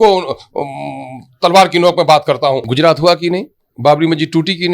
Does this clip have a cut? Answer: yes; 1 cut; at 2.7 s

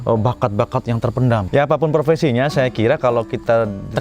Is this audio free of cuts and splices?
no; 1 cut; at 1.5 s

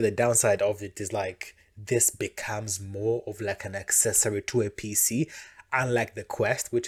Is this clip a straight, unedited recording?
yes; 0 cuts

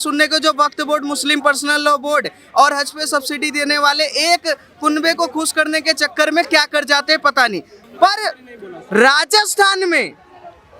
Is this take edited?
yes; 1 cut; at 7.8 s

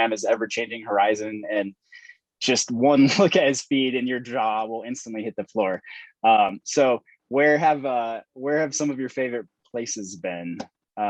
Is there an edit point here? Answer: no; 0 cuts

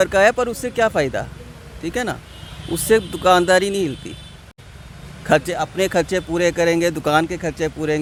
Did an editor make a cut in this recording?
no; 0 cuts

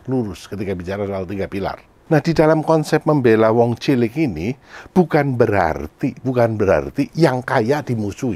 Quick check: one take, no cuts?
no; 1 cut; at 1.9 s

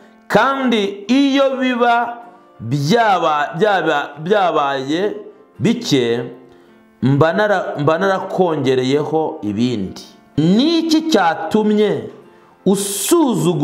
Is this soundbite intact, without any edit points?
no; 1 cut; at 10.4 s

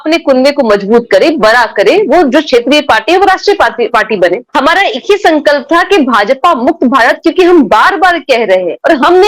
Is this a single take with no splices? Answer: no; 1 cut; at 4.4 s

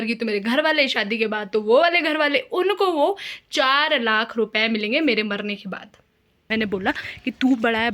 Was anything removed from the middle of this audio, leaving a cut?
yes; 1 cut; at 6.5 s

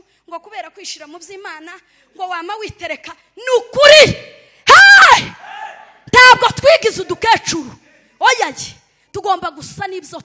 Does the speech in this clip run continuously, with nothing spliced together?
yes; 0 cuts

